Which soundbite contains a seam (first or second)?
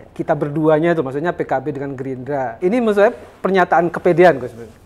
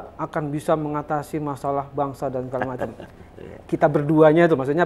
first